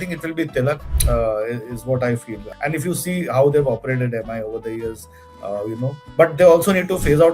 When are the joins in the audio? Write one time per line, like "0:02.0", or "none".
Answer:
0:00.9
0:02.4